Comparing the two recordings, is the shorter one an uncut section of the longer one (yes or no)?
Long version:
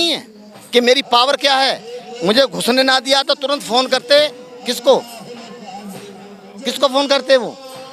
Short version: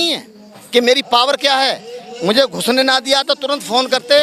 yes